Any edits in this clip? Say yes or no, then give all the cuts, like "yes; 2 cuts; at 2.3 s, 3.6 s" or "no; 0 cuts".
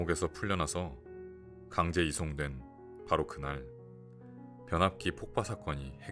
no; 0 cuts